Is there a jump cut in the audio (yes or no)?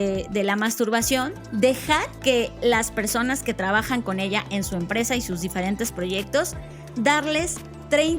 yes